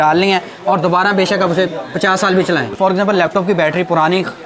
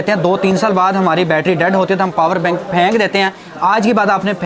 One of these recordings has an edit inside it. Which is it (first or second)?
first